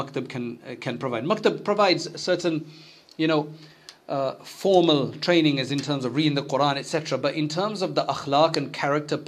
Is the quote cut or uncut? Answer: uncut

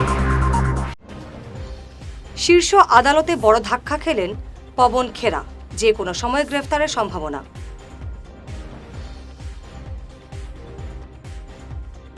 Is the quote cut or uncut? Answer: cut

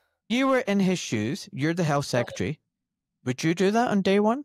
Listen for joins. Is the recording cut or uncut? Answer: uncut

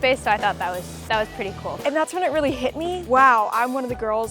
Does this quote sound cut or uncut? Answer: cut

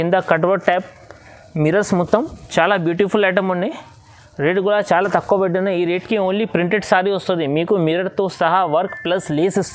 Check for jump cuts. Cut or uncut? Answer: uncut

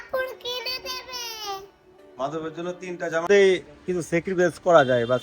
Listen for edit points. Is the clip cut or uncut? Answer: cut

